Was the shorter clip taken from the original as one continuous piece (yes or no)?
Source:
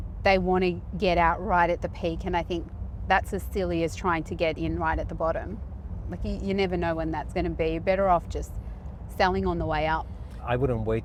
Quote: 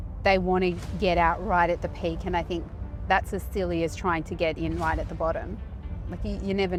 yes